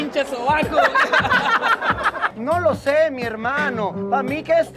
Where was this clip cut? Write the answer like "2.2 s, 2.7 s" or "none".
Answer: 2.3 s